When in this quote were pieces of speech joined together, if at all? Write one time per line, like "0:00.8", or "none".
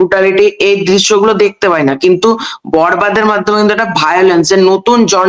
none